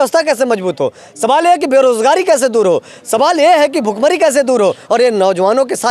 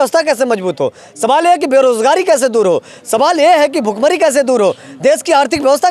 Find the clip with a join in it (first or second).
first